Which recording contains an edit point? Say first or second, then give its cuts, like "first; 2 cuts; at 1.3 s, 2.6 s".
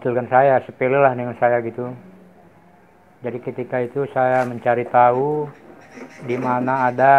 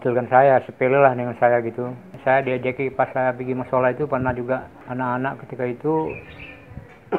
second; 2 cuts; at 2.1 s, 4.8 s